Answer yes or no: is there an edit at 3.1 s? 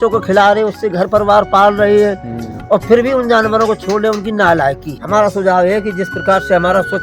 no